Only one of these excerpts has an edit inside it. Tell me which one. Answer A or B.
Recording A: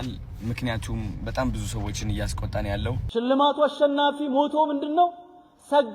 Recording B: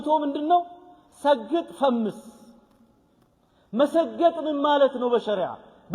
A